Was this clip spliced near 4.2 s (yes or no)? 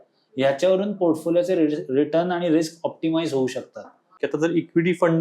yes